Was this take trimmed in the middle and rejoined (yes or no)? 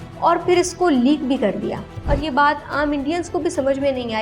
yes